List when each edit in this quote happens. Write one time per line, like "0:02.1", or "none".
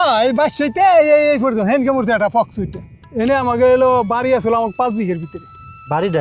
0:03.0

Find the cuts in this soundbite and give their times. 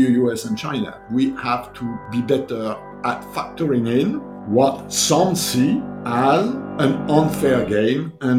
0:01.0
0:02.0
0:03.3
0:04.3
0:06.0
0:06.6

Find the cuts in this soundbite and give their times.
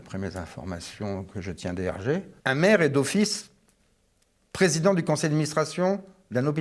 0:02.3

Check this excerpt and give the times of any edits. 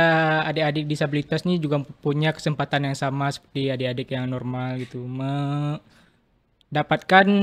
none

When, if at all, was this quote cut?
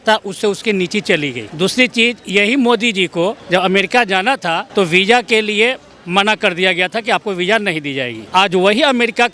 0:01.4
0:03.4
0:04.6
0:08.2

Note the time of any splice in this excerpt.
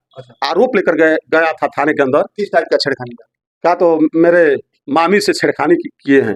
none

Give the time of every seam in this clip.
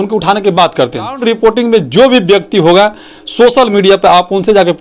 0:01.2

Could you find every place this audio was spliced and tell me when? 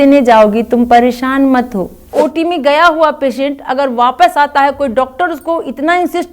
0:02.1

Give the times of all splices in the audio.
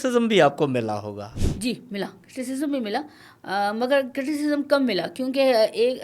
0:01.5

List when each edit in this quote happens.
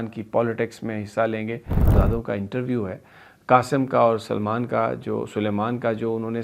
0:01.9

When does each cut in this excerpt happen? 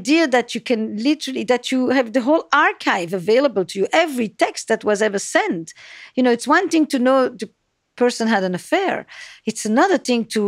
none

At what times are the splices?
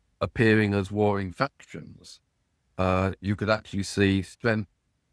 none

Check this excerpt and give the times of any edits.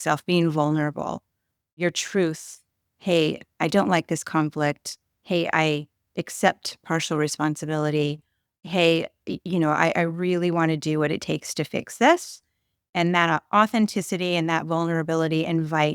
0:01.8

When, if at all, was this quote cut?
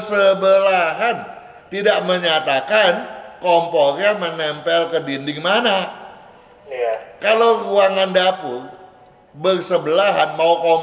none

